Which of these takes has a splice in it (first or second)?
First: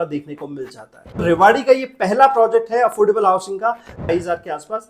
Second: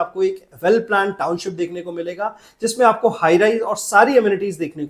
first